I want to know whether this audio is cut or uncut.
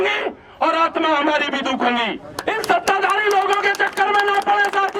cut